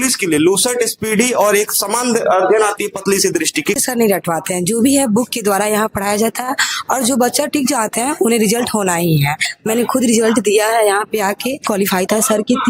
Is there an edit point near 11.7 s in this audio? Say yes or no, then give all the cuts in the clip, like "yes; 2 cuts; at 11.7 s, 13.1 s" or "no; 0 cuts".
yes; 3 cuts; at 3.8 s, 9.5 s, 11.7 s